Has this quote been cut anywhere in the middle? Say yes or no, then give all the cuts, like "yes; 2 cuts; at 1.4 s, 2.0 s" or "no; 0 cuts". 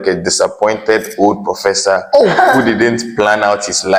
no; 0 cuts